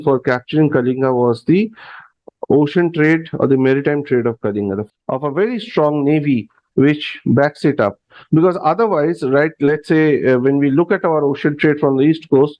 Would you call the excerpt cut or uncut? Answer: cut